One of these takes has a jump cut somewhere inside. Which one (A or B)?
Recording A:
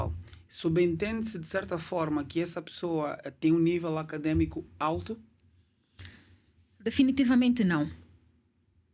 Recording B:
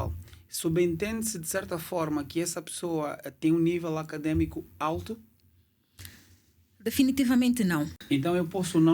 B